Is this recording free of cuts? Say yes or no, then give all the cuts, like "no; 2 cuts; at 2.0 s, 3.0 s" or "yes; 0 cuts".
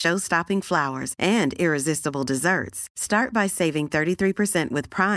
yes; 0 cuts